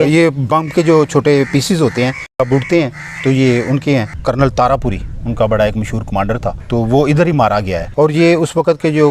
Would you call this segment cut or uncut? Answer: cut